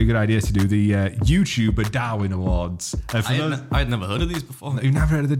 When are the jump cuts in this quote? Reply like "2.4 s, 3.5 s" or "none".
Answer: none